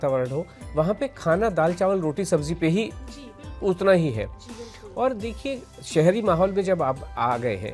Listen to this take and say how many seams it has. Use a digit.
0